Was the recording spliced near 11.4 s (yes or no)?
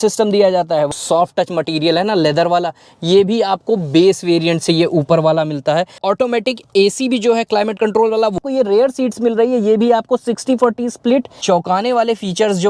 yes